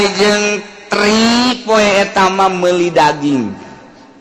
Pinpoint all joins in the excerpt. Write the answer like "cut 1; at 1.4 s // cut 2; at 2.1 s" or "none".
none